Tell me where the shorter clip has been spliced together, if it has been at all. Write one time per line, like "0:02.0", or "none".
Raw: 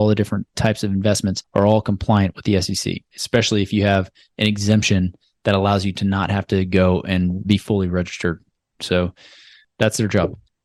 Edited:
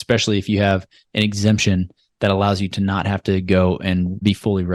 none